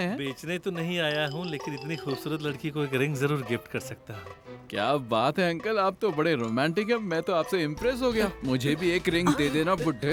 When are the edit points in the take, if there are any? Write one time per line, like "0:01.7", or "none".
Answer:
none